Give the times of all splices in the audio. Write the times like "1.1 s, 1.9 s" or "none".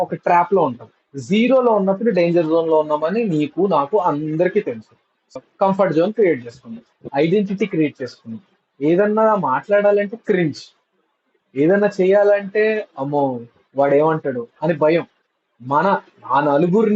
5.2 s, 7.1 s

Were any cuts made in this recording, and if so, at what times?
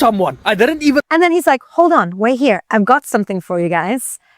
1.1 s

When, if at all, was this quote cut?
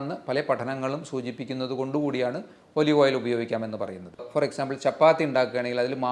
4.2 s

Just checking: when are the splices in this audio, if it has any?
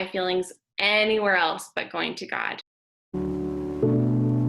2.6 s

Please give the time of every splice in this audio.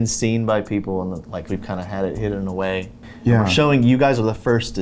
1.5 s, 3.0 s

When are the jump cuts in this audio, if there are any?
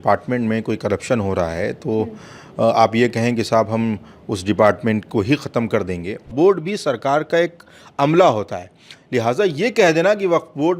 6.3 s

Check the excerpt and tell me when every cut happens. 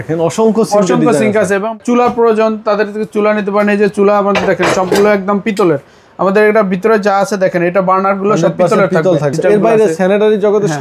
1.7 s, 9.4 s

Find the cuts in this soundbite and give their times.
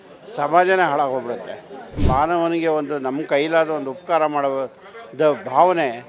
2.0 s

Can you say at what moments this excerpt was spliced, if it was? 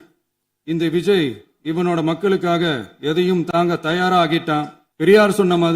4.8 s

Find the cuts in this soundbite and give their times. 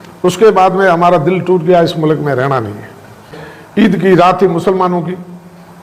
3.3 s

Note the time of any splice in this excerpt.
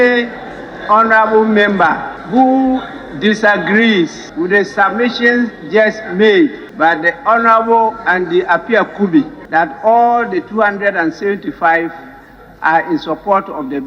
2.1 s, 4.2 s, 6.6 s, 9.4 s

